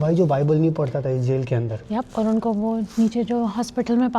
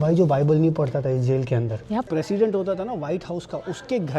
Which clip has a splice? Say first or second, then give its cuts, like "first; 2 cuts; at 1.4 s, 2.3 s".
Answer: second; 1 cut; at 2.1 s